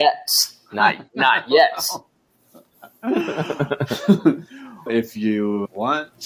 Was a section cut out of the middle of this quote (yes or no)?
no